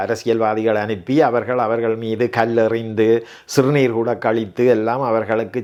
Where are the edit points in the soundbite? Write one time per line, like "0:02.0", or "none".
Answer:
none